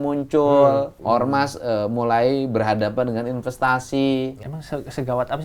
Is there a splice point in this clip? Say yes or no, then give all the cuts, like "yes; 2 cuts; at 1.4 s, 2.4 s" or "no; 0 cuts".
yes; 2 cuts; at 1.0 s, 4.4 s